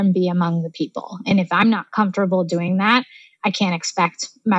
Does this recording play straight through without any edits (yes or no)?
yes